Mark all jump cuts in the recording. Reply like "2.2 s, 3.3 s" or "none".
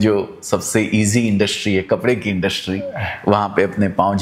none